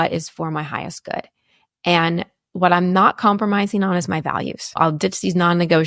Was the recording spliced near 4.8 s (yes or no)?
yes